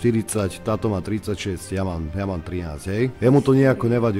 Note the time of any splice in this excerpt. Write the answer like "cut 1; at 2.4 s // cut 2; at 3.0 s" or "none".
cut 1; at 3.1 s